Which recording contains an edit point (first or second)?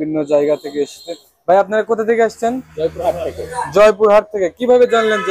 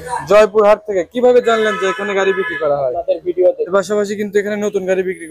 second